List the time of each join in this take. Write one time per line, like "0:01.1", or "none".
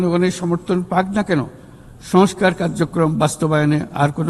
none